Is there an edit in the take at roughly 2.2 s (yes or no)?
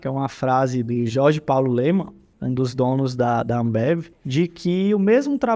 yes